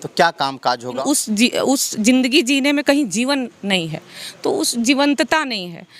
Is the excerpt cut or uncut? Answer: cut